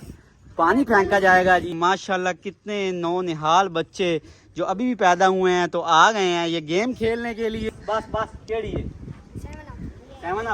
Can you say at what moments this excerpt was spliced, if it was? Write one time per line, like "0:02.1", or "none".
0:01.7
0:07.7